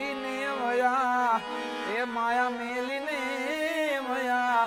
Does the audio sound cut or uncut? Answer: uncut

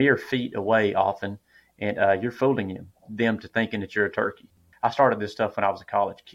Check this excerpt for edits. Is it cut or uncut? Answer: cut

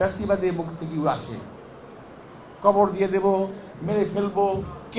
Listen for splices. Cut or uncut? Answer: uncut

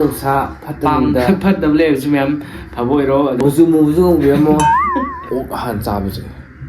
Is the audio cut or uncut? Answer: cut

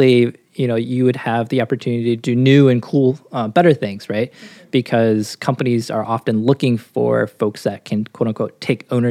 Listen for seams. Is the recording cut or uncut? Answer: cut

